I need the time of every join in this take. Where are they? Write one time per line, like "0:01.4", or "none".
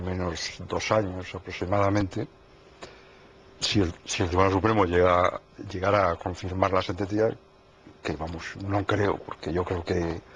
none